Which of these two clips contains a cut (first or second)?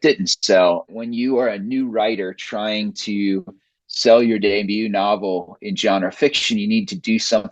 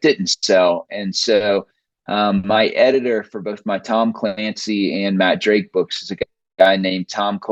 first